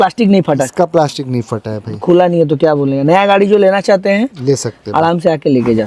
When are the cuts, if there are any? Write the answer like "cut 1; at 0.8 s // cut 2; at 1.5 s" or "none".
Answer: none